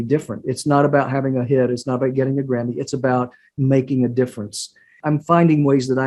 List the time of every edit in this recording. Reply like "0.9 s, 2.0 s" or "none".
5.0 s